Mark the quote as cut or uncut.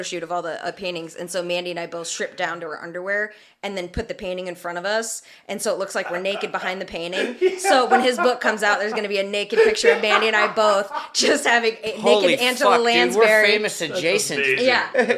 uncut